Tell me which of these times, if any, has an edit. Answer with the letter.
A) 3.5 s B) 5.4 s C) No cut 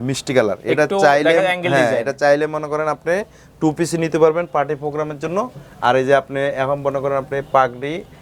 C